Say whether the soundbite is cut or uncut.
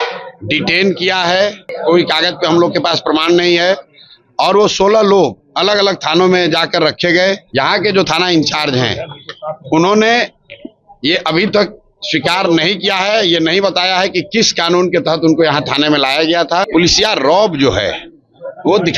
cut